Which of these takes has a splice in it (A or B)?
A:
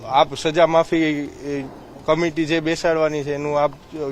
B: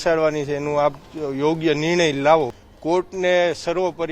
B